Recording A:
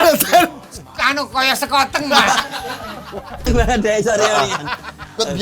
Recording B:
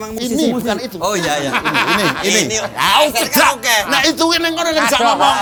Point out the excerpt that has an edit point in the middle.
A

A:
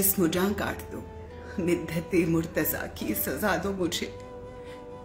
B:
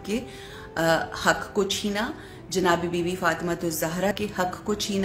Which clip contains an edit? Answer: B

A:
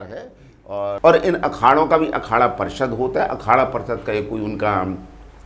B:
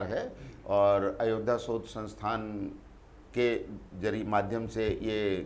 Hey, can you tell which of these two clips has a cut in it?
A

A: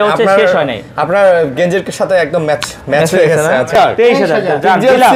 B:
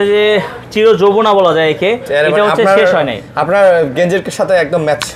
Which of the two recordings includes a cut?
A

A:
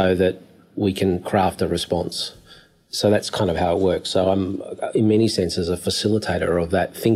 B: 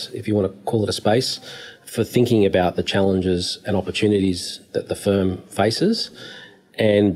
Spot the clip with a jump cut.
B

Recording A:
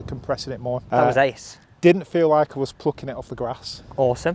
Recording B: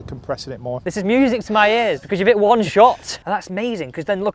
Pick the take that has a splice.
B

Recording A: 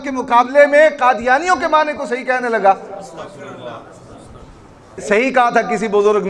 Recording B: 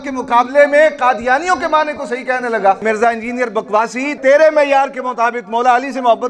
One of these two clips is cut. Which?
B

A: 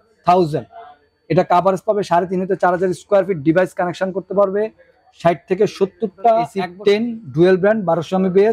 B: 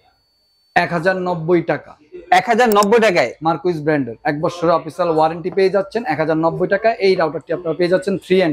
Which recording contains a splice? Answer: A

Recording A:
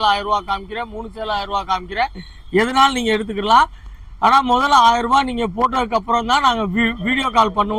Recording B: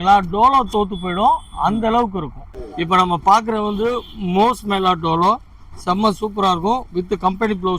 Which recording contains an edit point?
B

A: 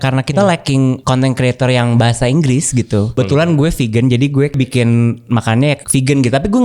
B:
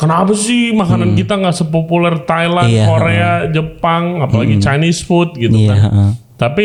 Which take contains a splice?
A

